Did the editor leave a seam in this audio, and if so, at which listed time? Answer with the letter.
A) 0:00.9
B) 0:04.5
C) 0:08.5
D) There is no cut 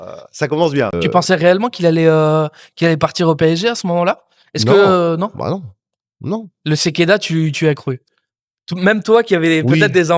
A